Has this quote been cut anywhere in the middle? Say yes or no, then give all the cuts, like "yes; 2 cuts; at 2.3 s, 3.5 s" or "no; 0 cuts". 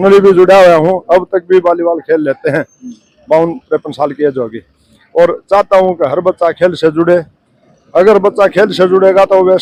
no; 0 cuts